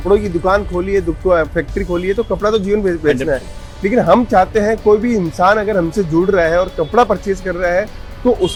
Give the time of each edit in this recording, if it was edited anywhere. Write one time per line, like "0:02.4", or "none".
none